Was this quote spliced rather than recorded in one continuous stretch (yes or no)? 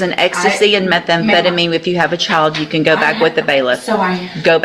no